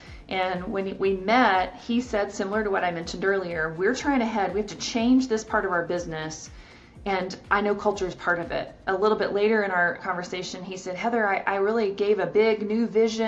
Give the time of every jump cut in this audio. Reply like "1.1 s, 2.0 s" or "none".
none

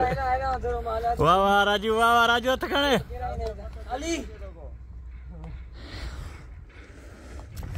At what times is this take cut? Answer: none

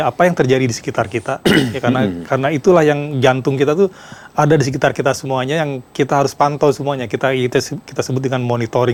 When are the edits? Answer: none

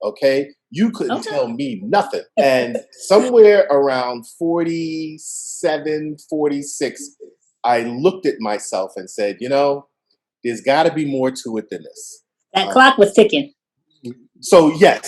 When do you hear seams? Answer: none

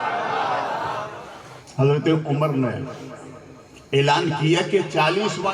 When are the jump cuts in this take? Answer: 1.2 s

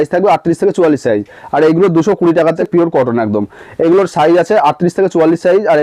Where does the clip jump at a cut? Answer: 2.6 s

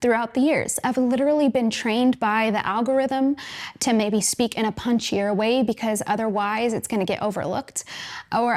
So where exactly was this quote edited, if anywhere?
none

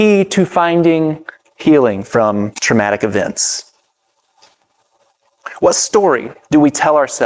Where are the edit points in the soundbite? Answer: none

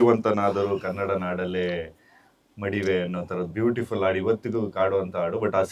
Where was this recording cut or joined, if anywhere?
3.5 s

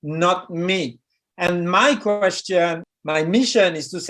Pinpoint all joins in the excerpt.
2.9 s

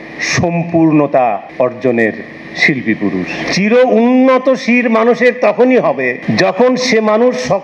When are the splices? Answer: 1.5 s, 3.5 s, 6.2 s

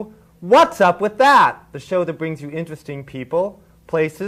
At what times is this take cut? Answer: 1.1 s

